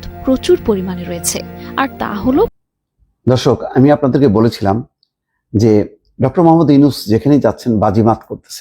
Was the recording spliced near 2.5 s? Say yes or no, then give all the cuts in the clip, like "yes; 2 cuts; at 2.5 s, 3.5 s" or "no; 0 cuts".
yes; 1 cut; at 2.5 s